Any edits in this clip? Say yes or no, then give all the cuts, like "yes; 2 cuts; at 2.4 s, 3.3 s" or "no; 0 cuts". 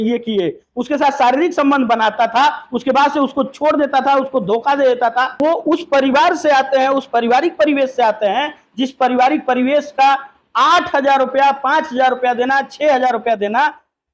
yes; 1 cut; at 5.4 s